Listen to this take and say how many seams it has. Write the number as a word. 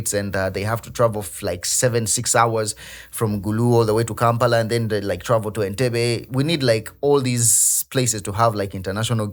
zero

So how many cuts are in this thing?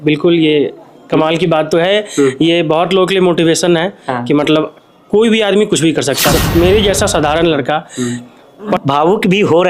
two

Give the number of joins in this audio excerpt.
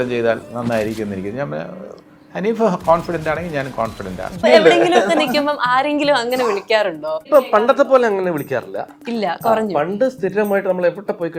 two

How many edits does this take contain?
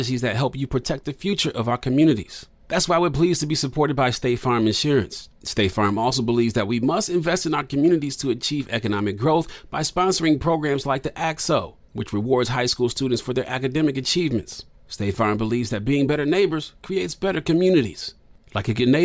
zero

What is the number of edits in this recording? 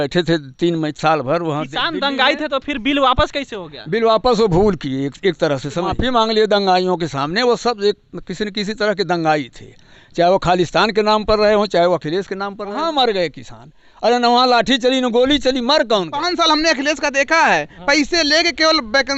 three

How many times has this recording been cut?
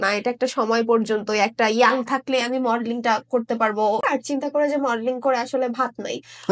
one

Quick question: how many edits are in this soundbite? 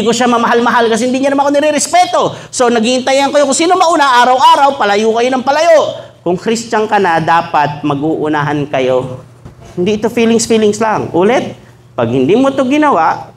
one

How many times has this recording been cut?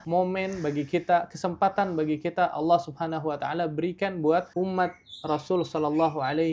zero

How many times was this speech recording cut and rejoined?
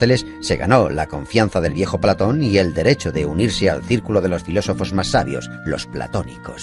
one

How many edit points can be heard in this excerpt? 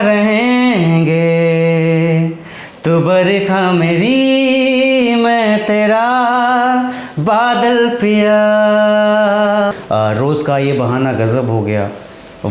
one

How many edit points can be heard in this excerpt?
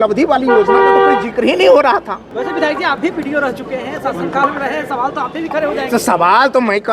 one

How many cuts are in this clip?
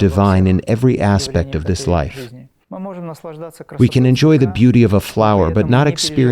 one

